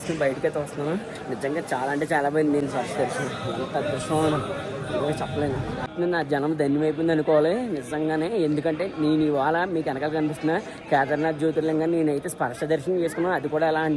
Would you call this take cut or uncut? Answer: uncut